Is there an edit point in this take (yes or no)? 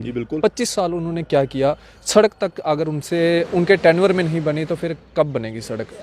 no